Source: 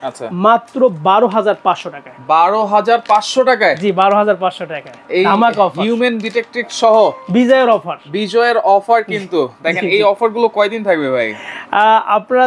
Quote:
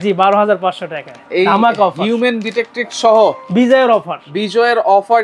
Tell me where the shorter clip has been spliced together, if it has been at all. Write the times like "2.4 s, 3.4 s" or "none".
none